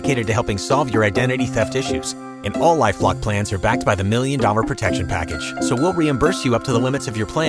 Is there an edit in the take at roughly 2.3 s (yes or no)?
no